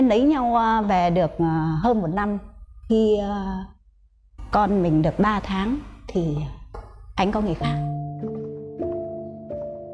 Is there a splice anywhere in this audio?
no; 0 cuts

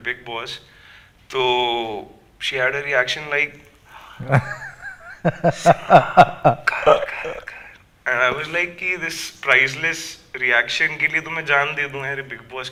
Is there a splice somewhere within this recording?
no; 0 cuts

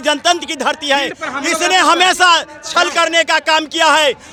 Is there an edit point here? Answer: no; 0 cuts

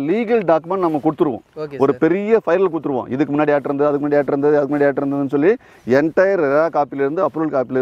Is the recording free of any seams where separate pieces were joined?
yes; 0 cuts

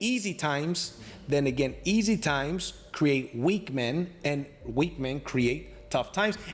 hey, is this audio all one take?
yes; 0 cuts

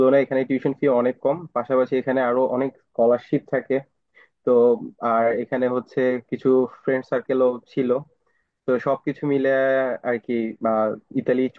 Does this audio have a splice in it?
no; 0 cuts

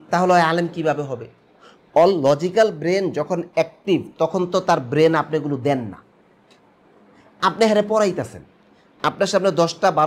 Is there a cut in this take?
no; 0 cuts

